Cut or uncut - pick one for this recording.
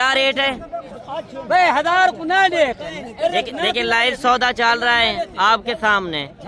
cut